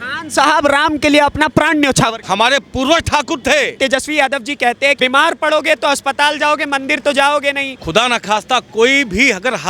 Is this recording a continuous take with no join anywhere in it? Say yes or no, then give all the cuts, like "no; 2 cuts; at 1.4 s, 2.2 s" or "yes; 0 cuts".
no; 4 cuts; at 2.2 s, 3.8 s, 5.0 s, 7.7 s